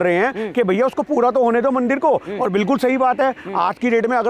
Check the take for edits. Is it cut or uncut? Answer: uncut